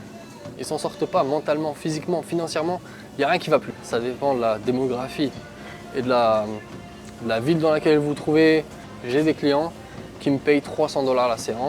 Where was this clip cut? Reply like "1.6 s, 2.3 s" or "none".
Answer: 3.8 s, 8.9 s